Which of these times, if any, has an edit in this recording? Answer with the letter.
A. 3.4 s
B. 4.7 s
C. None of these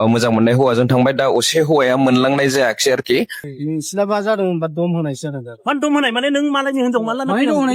A